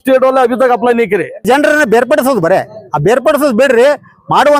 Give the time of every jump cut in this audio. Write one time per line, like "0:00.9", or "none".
0:01.4